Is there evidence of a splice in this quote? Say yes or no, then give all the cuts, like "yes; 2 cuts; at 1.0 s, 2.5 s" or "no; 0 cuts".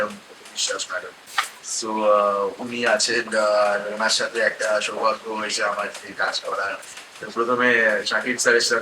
no; 0 cuts